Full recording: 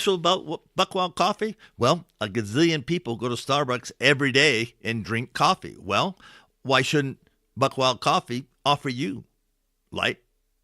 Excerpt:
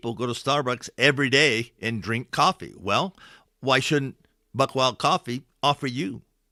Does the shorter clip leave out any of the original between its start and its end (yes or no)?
no